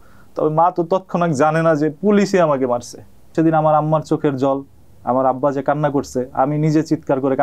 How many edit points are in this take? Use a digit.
1